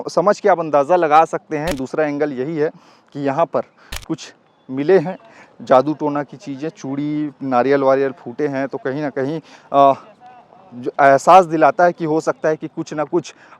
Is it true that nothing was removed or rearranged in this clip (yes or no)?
no